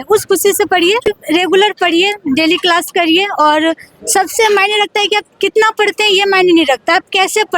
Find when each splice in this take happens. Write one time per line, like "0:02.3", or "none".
0:01.1